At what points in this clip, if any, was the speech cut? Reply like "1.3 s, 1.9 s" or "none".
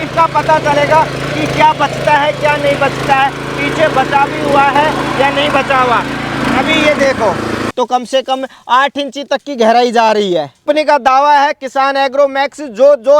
7.6 s, 10.6 s